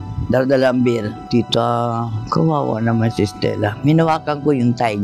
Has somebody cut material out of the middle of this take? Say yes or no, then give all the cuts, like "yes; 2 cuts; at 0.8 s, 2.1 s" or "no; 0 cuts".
yes; 1 cut; at 1.2 s